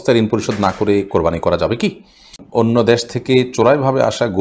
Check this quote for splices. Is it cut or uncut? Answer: cut